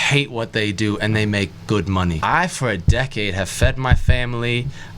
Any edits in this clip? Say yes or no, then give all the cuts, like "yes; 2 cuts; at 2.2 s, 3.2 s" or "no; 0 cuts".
yes; 1 cut; at 2.2 s